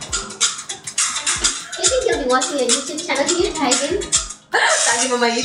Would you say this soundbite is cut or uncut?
uncut